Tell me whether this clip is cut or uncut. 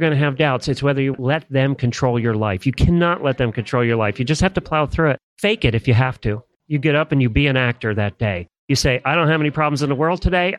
cut